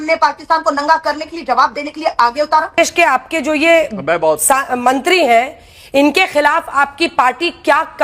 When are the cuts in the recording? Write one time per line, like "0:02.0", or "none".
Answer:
0:02.7